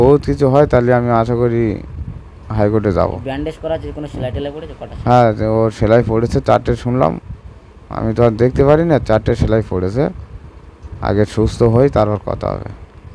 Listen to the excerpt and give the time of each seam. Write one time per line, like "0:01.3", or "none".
none